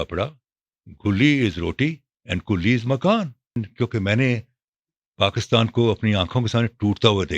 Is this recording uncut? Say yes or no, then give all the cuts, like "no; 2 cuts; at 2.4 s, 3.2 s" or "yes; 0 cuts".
no; 1 cut; at 3.6 s